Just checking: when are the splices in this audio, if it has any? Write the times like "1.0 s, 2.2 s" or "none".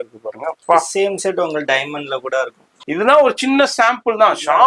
2.7 s